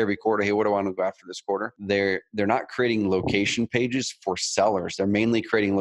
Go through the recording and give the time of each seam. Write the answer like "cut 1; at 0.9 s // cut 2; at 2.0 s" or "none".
cut 1; at 1.7 s

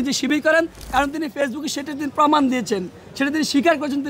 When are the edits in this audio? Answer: none

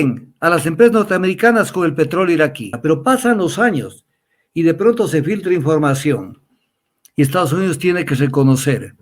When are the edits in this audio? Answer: cut 1; at 2.7 s

